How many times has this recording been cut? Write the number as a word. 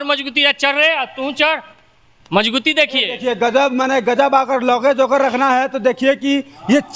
zero